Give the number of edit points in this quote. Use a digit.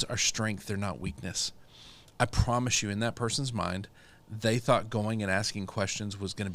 0